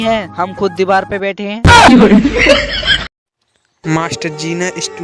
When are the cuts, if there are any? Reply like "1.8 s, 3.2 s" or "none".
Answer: 3.2 s